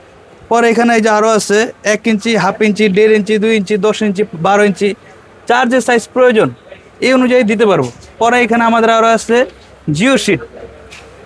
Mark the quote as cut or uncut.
uncut